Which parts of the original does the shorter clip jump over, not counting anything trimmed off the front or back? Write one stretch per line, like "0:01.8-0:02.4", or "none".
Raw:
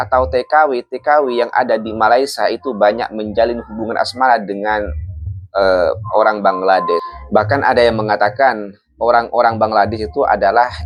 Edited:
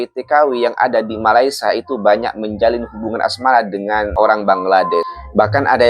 0:04.9-0:06.1